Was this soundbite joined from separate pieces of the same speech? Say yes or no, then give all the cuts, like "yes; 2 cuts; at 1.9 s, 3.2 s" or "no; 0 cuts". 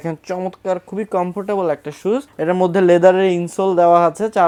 no; 0 cuts